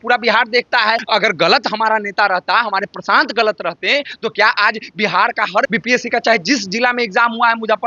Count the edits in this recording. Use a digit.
2